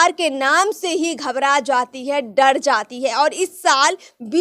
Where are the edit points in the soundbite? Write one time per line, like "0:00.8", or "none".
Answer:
none